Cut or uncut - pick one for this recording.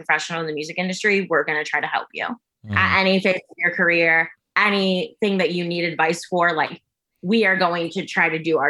uncut